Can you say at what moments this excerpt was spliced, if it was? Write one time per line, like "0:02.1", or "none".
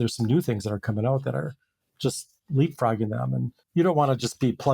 0:03.6